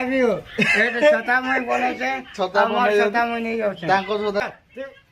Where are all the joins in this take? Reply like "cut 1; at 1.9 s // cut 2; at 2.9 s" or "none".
cut 1; at 0.9 s // cut 2; at 4.4 s